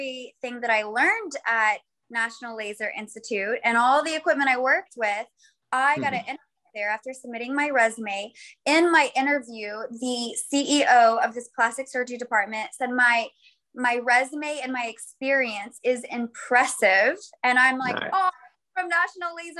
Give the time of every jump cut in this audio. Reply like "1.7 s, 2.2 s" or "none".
none